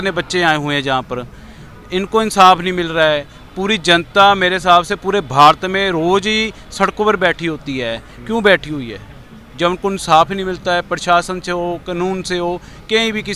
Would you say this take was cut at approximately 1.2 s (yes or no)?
no